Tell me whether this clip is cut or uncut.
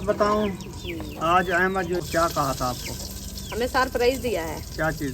cut